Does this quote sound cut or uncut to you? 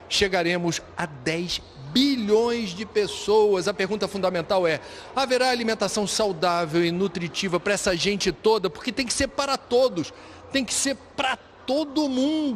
cut